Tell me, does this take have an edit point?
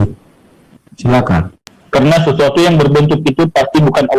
yes; 1 cut; at 1.5 s

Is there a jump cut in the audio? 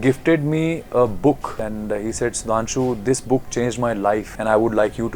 yes; 2 cuts; at 1.6 s, 4.3 s

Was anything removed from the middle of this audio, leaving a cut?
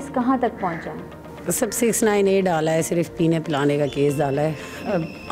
no; 0 cuts

